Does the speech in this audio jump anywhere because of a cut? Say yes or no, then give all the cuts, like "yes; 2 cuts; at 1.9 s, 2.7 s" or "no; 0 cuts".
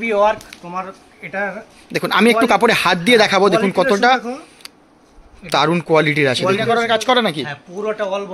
yes; 1 cut; at 6.7 s